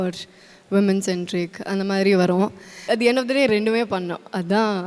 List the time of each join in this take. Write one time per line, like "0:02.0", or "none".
0:02.8